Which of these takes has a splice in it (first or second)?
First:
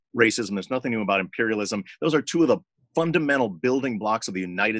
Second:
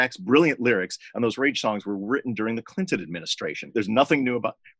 second